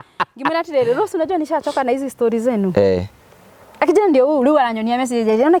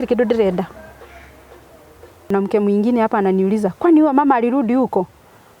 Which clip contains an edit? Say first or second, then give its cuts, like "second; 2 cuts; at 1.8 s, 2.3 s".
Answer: second; 1 cut; at 2.3 s